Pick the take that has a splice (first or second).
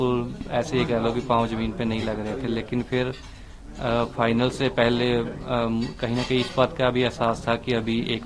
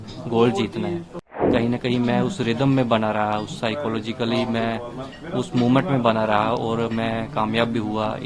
second